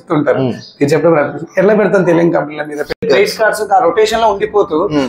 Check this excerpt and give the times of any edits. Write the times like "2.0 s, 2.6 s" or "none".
3.0 s